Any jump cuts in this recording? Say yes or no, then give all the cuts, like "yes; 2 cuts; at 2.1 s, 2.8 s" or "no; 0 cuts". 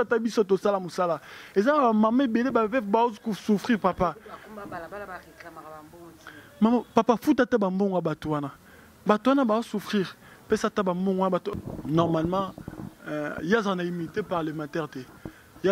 yes; 1 cut; at 11.5 s